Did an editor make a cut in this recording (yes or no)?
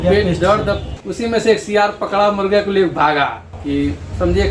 yes